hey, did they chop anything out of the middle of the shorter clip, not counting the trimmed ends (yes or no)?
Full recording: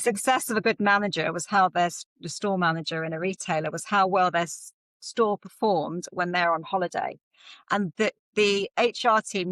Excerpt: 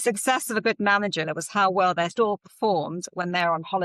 yes